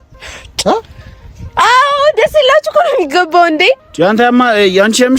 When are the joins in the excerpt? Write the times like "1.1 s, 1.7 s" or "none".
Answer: none